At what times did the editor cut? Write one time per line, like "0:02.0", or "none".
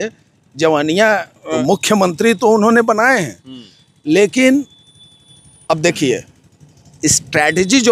0:01.4